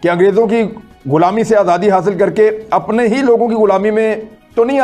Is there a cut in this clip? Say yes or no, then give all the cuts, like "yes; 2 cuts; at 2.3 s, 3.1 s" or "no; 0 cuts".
no; 0 cuts